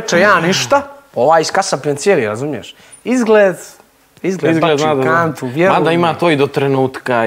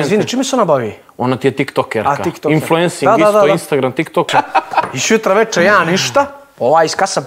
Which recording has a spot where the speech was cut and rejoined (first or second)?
second